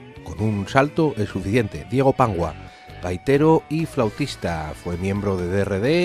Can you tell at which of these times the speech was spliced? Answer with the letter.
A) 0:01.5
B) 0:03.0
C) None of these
A